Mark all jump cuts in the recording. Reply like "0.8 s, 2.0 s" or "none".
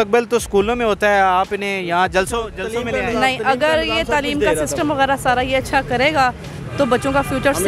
none